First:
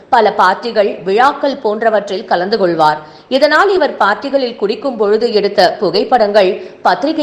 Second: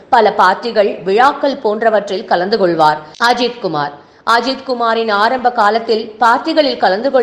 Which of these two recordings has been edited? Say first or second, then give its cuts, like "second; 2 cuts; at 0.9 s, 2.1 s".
second; 1 cut; at 3.1 s